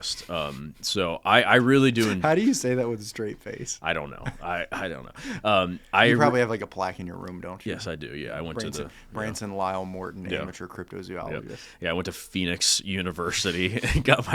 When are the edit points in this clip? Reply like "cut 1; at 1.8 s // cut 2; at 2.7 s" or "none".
none